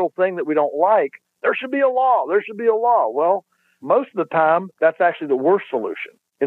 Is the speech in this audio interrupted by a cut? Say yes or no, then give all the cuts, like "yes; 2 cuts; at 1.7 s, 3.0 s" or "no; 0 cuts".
yes; 1 cut; at 4.7 s